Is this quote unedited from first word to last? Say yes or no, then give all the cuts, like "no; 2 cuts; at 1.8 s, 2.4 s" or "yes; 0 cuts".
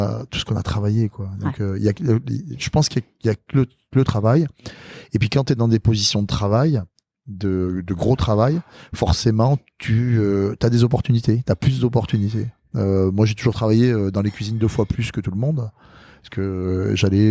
yes; 0 cuts